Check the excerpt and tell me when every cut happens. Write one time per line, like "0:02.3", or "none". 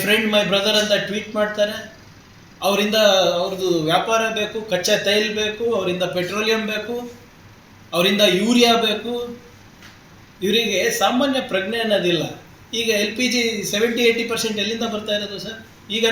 none